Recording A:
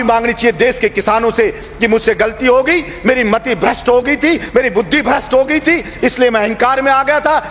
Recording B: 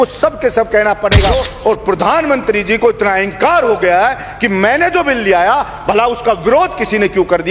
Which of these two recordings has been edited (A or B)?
B